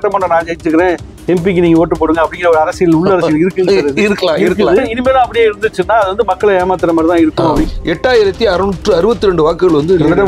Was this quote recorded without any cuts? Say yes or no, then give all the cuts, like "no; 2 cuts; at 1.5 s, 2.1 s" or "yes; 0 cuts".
no; 2 cuts; at 4.9 s, 7.6 s